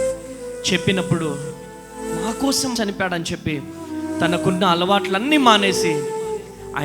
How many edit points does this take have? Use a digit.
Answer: 1